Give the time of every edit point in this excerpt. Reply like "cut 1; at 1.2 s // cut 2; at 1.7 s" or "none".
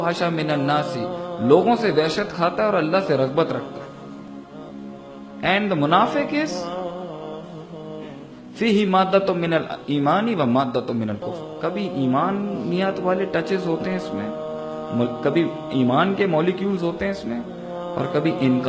none